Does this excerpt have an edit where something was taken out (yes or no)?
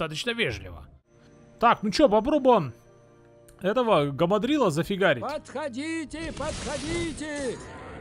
yes